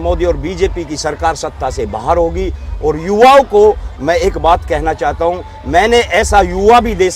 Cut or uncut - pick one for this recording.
uncut